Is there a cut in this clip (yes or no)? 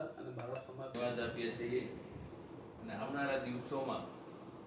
yes